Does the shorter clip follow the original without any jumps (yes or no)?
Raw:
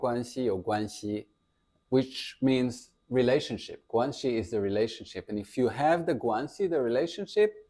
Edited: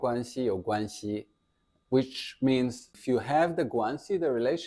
no